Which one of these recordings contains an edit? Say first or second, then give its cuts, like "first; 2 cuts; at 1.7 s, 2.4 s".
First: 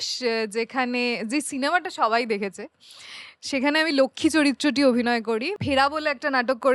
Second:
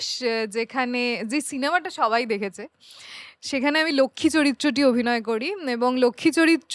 first; 1 cut; at 5.6 s